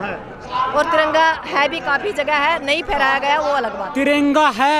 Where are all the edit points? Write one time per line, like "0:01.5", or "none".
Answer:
none